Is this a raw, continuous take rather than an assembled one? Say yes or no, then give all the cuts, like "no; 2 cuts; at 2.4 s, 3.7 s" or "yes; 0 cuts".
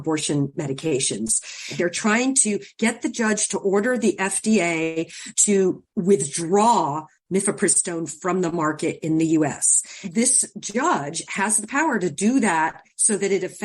no; 2 cuts; at 1.7 s, 10.0 s